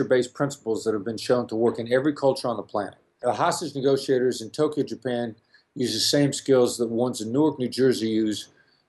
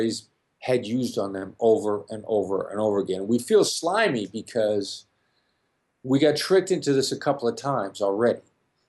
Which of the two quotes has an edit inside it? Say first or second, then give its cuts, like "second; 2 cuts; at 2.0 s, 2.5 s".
first; 1 cut; at 3.2 s